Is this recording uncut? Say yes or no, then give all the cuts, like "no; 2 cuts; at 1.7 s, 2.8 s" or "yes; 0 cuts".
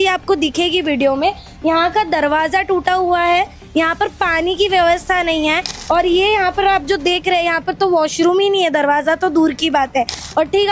no; 1 cut; at 5.7 s